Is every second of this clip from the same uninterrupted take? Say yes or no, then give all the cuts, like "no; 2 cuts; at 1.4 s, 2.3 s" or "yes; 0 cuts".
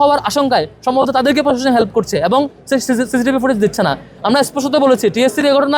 yes; 0 cuts